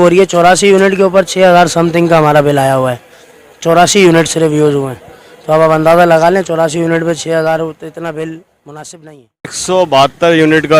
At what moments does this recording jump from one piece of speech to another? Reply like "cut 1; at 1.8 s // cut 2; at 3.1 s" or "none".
cut 1; at 9.6 s